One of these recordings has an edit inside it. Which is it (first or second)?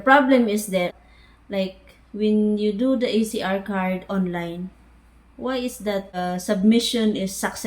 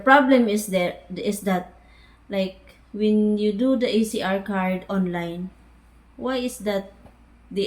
first